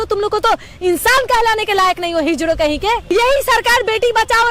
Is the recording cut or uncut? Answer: cut